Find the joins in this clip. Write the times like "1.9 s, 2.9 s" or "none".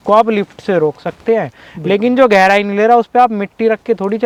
none